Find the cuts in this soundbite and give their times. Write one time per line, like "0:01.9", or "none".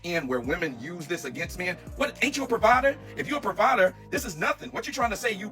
none